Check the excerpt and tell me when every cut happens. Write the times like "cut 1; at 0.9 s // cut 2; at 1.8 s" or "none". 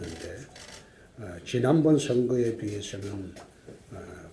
cut 1; at 1.7 s

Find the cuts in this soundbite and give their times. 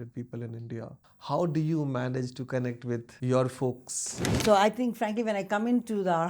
cut 1; at 1.1 s // cut 2; at 3.1 s // cut 3; at 4.3 s

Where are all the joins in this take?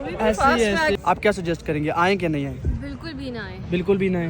cut 1; at 1.0 s

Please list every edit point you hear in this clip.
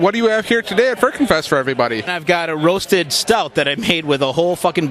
cut 1; at 2.1 s

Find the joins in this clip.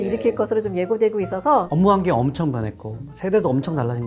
cut 1; at 1.7 s

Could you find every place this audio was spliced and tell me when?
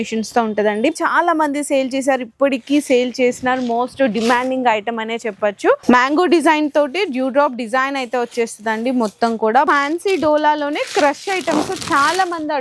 cut 1; at 0.9 s // cut 2; at 5.8 s // cut 3; at 9.7 s

